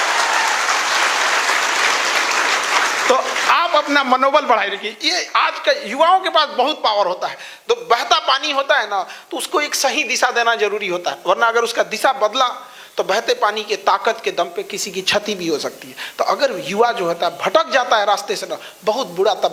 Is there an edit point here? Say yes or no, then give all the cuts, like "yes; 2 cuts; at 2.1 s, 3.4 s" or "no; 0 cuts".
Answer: no; 0 cuts